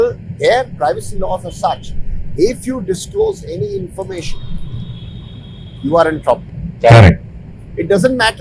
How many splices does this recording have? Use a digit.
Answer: 0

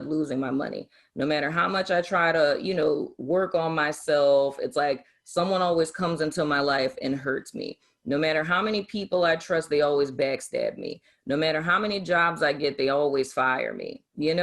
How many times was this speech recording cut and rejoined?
0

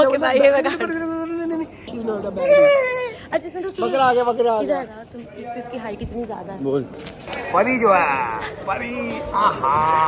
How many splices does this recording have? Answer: 4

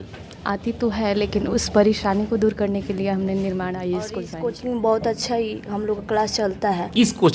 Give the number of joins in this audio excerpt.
1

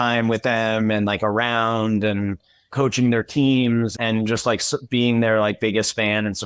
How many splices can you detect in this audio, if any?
0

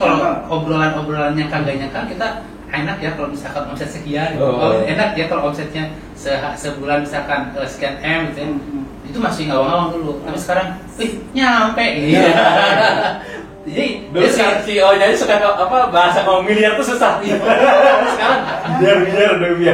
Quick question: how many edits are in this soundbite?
0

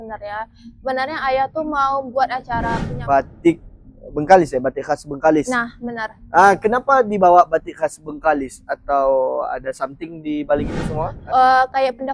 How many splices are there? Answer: 2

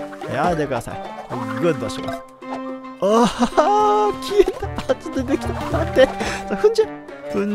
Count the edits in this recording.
0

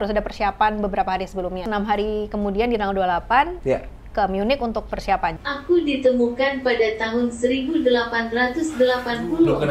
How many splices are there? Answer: 2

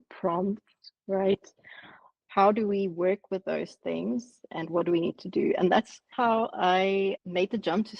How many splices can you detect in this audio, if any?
1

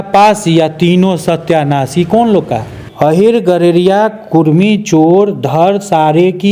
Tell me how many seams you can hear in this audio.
0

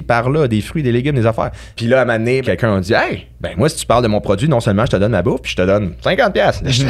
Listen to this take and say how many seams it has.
2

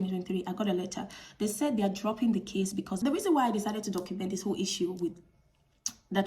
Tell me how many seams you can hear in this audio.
1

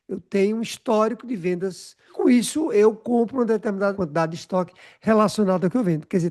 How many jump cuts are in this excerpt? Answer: 1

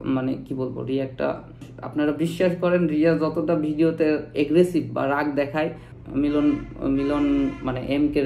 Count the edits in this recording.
2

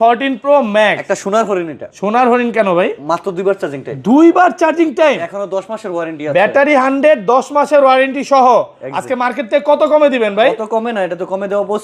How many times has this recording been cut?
0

